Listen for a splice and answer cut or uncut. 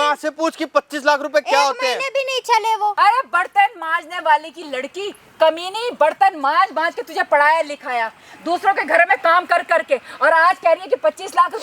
cut